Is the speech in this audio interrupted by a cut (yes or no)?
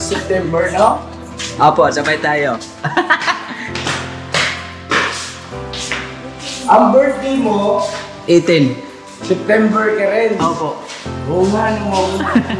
no